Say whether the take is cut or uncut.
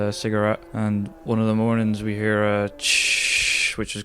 cut